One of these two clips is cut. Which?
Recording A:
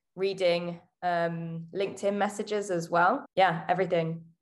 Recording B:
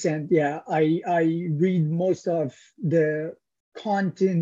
A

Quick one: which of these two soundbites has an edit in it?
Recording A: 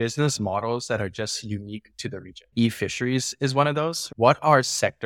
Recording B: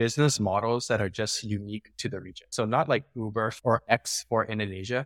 A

